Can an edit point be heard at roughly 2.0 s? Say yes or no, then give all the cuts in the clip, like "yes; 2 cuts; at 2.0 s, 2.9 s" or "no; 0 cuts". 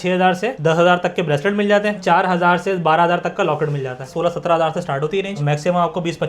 yes; 2 cuts; at 2.0 s, 4.1 s